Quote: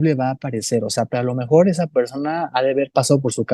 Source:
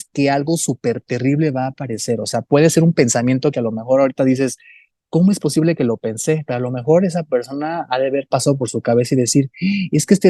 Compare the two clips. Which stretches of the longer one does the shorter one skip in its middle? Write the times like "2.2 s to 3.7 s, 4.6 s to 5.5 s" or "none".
2.4 s to 6.4 s